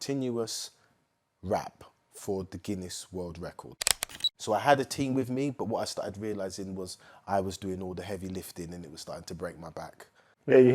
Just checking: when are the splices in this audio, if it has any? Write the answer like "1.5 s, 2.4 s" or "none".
3.9 s